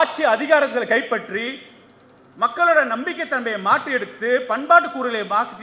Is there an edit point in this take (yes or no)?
no